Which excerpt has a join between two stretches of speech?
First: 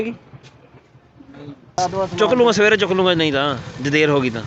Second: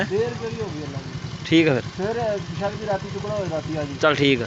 first; 1 cut; at 1.8 s

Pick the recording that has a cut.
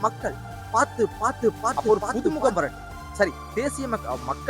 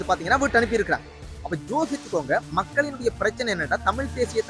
first; 1 cut; at 1.8 s

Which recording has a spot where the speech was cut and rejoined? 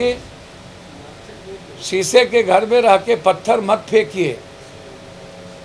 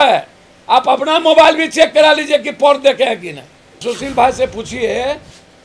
second; 1 cut; at 3.8 s

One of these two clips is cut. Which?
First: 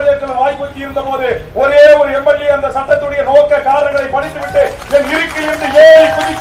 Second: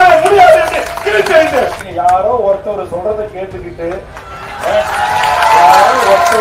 second; 1 cut; at 1.8 s

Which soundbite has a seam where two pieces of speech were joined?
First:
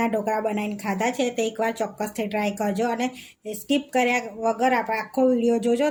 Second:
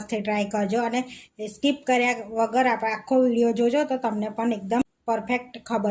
second; 1 cut; at 4.8 s

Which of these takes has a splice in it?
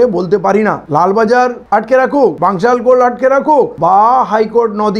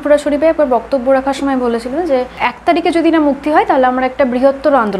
first; 3 cuts; at 0.8 s, 2.4 s, 3.7 s

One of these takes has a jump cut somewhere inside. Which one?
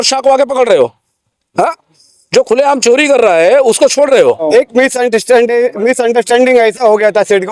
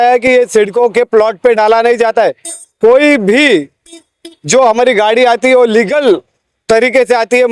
first; 1 cut; at 4.5 s

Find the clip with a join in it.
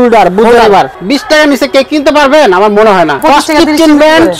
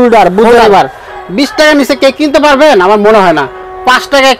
first; 2 cuts; at 1.0 s, 3.2 s

